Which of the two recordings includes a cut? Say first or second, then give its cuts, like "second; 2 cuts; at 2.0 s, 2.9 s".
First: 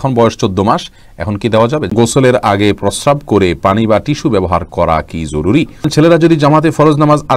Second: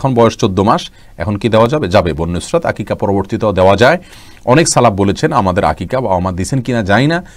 first; 2 cuts; at 1.9 s, 5.9 s